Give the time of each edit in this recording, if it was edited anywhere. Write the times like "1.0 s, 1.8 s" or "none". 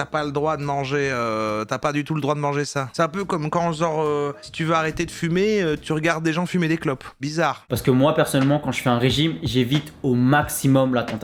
none